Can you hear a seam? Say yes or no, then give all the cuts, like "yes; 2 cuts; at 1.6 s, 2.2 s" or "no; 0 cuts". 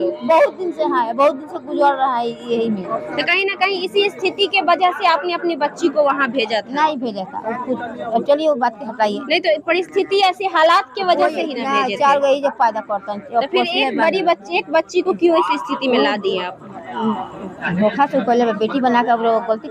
no; 0 cuts